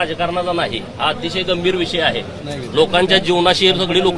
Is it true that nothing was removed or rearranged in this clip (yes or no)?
yes